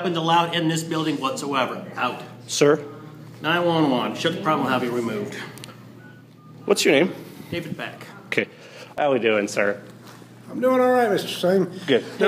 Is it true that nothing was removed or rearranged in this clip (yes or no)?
no